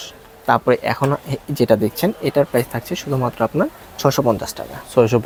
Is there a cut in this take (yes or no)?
no